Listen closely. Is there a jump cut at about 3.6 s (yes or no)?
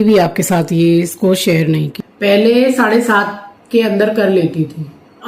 no